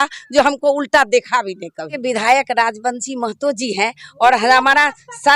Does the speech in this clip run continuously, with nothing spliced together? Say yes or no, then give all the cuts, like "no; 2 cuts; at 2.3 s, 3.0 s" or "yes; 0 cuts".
no; 1 cut; at 1.9 s